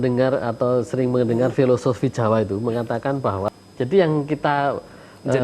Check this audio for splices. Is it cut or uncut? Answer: cut